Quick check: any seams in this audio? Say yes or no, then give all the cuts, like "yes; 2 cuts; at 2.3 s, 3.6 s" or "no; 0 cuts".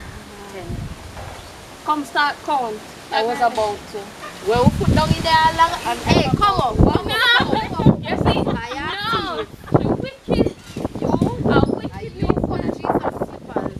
no; 0 cuts